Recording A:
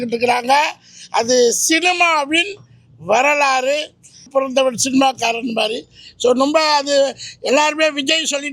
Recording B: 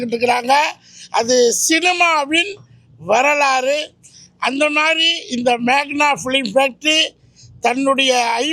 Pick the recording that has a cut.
A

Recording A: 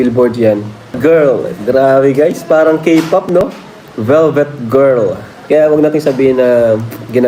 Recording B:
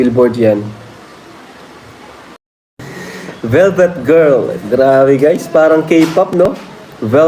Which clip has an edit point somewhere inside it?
A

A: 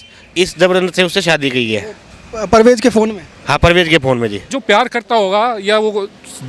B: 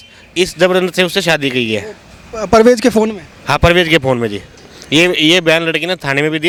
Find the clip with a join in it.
A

